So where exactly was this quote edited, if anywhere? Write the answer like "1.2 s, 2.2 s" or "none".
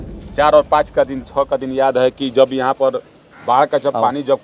none

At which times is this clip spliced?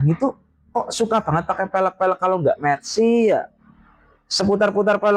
none

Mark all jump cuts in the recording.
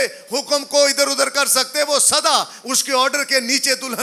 none

